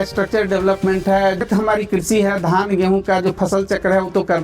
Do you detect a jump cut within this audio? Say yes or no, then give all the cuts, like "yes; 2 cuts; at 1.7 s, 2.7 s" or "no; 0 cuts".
yes; 1 cut; at 1.4 s